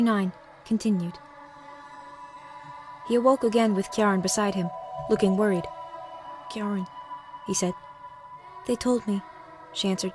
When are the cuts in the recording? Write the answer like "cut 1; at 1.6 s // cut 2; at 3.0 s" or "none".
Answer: cut 1; at 6.7 s

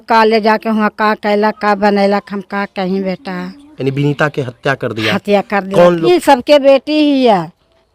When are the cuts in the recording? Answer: cut 1; at 6.1 s

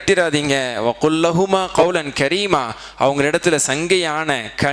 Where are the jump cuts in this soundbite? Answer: cut 1; at 1.7 s

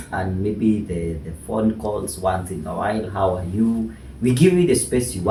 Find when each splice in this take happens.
none

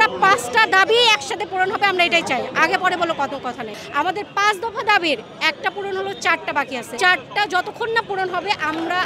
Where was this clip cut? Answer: cut 1; at 3.7 s

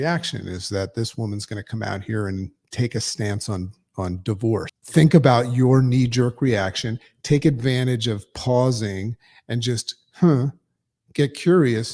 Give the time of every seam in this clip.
cut 1; at 4.8 s

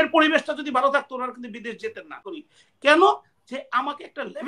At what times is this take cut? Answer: cut 1; at 2.2 s

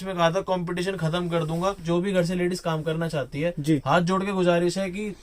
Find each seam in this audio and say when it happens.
cut 1; at 1.8 s

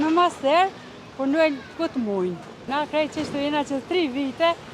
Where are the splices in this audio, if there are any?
cut 1; at 2.6 s

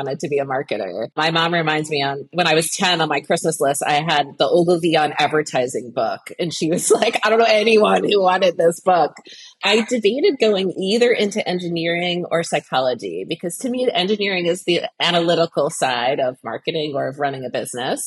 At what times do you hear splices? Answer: cut 1; at 1.1 s // cut 2; at 2.3 s // cut 3; at 9.6 s // cut 4; at 10.7 s

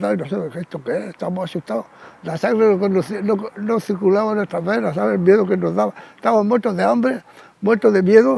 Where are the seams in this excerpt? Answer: cut 1; at 1.9 s // cut 2; at 6.4 s

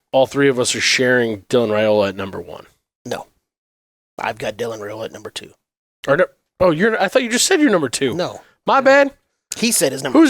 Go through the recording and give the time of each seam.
none

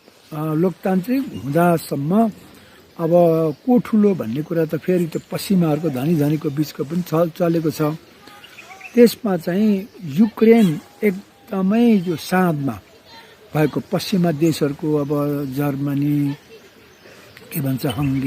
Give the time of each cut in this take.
none

